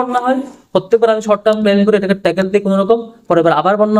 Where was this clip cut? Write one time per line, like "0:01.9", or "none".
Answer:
none